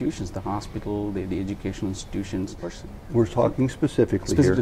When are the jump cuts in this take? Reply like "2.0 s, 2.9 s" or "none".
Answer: 2.7 s